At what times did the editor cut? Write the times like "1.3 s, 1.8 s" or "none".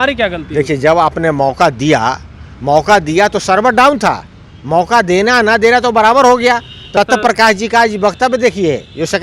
6.9 s